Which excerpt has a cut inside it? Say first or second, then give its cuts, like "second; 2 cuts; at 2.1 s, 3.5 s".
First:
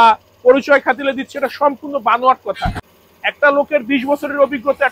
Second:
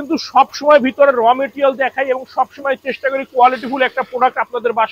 first; 1 cut; at 2.9 s